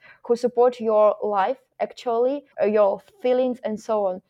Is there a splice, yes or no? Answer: yes